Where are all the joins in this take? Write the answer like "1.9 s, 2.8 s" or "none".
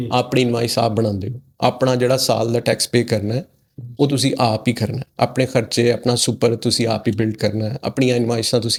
none